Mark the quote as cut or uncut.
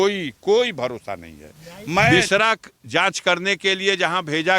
cut